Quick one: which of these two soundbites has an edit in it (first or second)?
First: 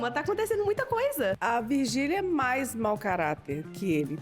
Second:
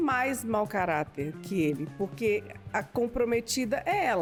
first